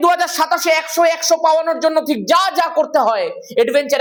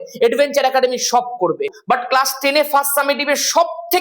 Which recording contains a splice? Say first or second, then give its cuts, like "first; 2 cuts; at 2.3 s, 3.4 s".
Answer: second; 1 cut; at 1.7 s